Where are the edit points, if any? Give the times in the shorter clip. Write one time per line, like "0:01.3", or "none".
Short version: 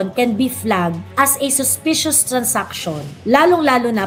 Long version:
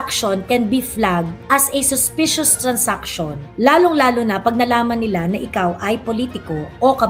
none

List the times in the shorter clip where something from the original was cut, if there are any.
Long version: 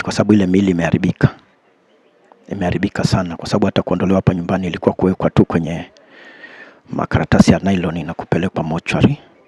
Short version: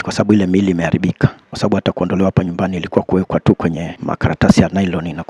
0:01.5
0:03.9

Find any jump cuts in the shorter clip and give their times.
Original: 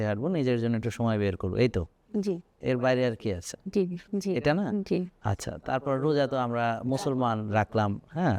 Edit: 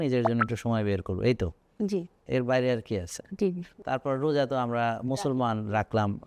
0:03.7

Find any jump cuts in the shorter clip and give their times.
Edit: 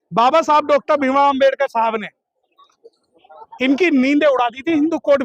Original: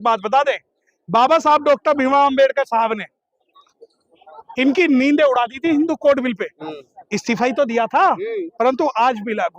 none

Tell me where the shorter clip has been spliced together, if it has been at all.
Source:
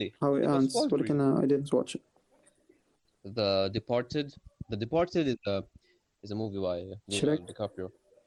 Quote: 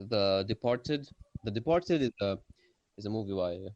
none

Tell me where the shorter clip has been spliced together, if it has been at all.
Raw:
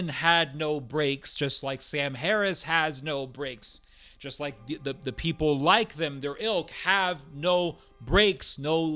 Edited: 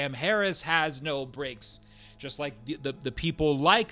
none

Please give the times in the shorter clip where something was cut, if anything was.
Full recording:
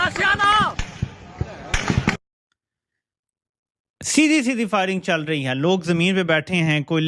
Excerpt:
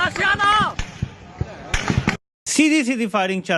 0:02.4

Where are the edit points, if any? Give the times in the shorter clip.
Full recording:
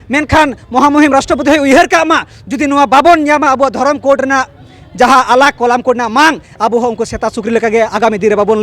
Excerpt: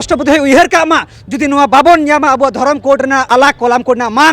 0:03.3

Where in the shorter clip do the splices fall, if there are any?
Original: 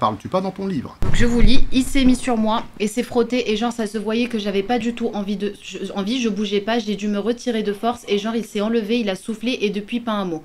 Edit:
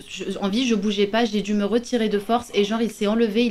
none

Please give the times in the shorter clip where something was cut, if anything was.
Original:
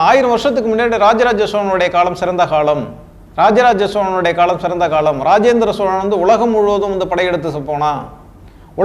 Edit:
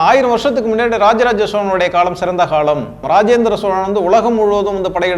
0:03.0

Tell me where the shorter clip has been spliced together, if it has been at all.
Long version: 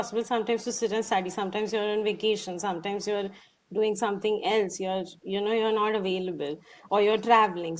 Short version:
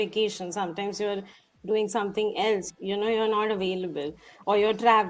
0:02.7

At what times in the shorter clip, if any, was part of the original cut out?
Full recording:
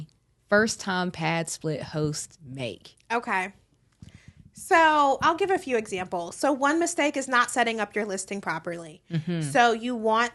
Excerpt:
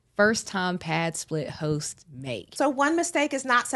0:02.5

